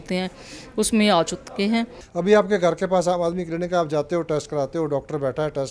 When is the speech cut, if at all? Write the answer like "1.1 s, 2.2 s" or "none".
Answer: 2.0 s

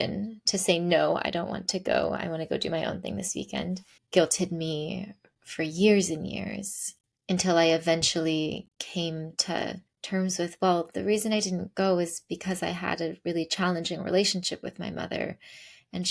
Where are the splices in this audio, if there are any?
3.9 s, 8.8 s, 9.9 s

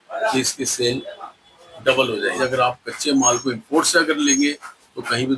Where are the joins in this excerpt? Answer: 2.4 s

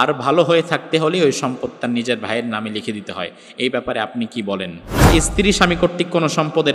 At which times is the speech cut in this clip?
5.1 s

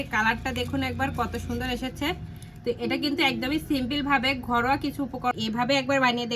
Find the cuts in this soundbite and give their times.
5.3 s

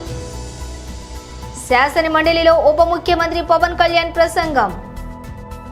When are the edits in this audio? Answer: none

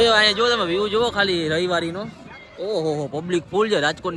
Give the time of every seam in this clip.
none

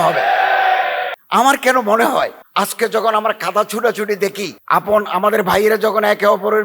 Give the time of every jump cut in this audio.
1.1 s, 2.4 s, 4.5 s

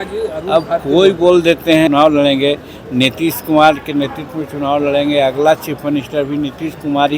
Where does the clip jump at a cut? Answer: 1.9 s

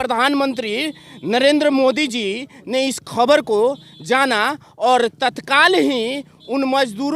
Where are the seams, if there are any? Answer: none

